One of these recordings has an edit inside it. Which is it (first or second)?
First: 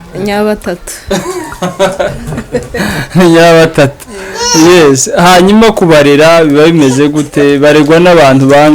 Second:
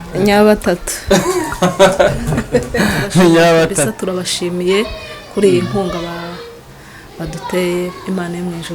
second